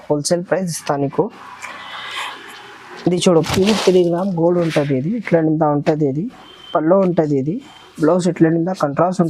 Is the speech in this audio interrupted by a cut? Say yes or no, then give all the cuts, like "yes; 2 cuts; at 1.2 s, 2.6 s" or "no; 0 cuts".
yes; 1 cut; at 3.3 s